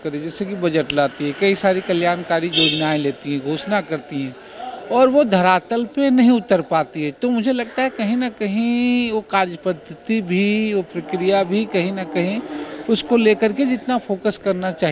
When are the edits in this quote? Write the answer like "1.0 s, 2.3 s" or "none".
none